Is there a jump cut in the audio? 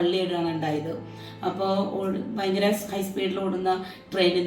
no; 0 cuts

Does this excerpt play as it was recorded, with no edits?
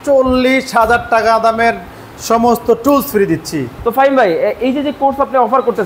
no; 1 cut; at 3.7 s

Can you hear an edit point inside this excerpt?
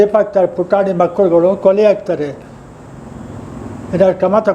no; 0 cuts

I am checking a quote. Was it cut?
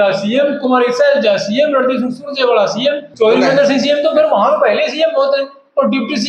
yes; 1 cut; at 3.1 s

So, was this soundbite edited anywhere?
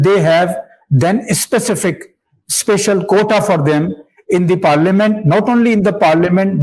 no; 0 cuts

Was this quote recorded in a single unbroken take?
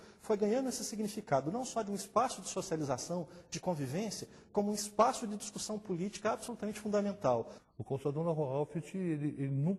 no; 1 cut; at 7.6 s

